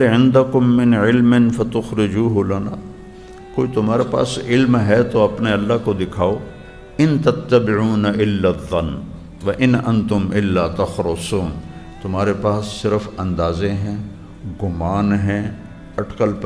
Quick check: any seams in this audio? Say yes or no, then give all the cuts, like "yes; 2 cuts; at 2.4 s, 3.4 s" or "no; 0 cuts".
no; 0 cuts